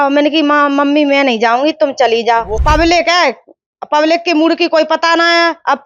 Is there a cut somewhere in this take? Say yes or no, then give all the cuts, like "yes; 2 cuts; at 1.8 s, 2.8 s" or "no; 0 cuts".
yes; 1 cut; at 2.6 s